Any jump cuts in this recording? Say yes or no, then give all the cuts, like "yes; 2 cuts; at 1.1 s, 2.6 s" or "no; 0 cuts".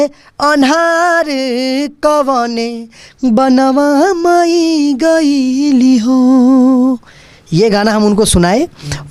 no; 0 cuts